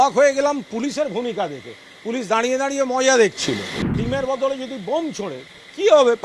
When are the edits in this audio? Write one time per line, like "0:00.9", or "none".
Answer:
0:04.0